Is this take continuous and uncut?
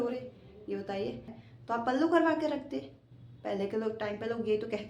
no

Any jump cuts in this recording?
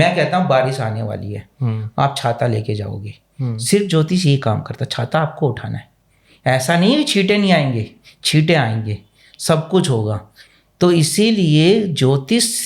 no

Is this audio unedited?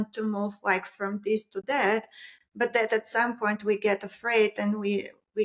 yes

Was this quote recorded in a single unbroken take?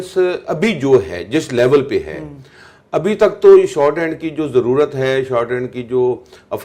yes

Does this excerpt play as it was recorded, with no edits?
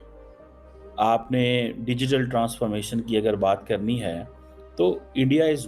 no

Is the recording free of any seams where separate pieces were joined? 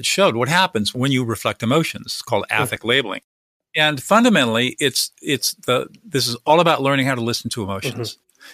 no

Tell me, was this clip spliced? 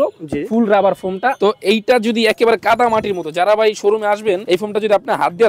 yes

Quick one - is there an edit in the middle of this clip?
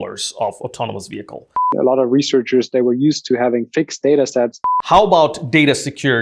yes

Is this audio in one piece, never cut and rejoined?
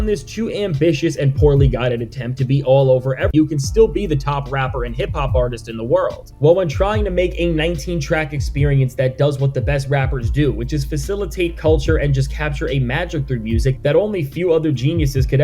no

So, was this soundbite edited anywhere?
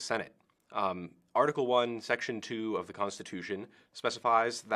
yes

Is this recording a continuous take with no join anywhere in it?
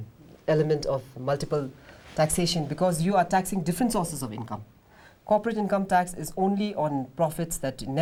yes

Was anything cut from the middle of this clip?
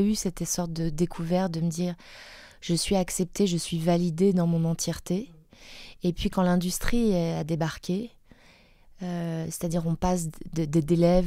no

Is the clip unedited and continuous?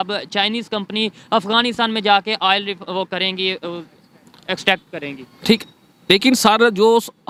yes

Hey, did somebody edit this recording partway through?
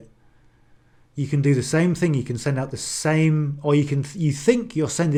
no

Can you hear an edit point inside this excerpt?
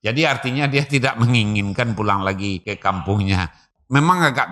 yes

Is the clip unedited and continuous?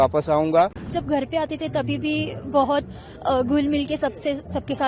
no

